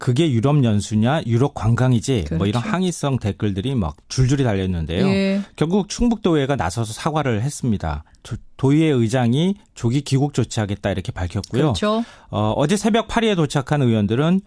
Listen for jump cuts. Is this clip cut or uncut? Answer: uncut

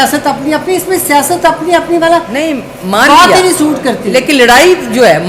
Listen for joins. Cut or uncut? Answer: uncut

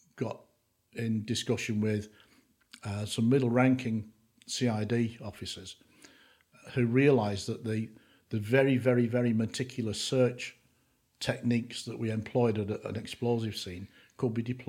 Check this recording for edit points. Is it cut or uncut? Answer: uncut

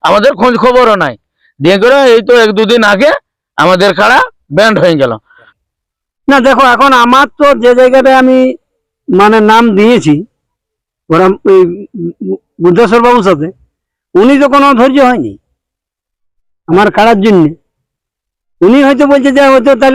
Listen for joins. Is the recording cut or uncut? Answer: cut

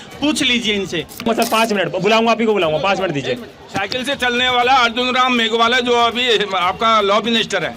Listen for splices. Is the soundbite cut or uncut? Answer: cut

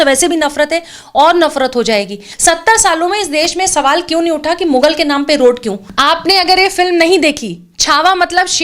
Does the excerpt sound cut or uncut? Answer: cut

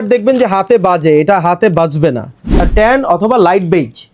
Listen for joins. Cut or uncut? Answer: cut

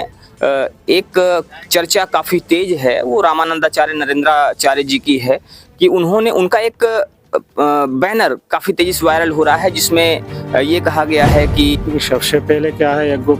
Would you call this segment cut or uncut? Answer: cut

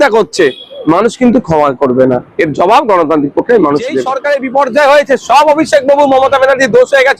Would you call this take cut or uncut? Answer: cut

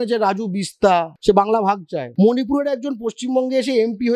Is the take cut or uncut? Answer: cut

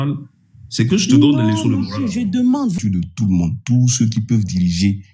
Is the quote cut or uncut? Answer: cut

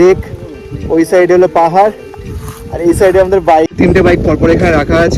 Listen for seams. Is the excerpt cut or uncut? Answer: cut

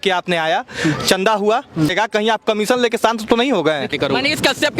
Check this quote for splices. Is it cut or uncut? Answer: cut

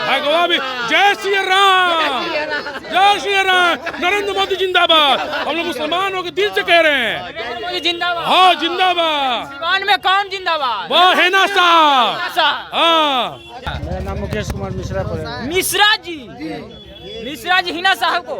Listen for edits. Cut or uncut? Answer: cut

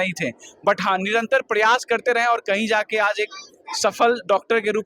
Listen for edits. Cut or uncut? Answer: uncut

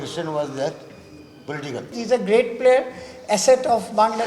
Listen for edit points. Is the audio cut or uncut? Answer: cut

